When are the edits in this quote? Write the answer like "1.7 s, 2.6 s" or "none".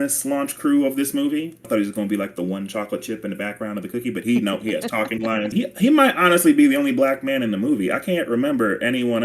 1.6 s, 5.5 s